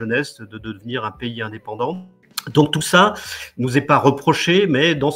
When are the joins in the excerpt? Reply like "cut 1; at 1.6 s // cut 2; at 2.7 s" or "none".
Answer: none